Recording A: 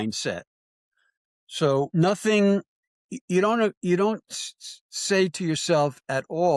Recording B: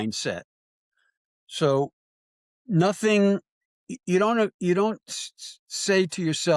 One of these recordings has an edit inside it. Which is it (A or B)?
A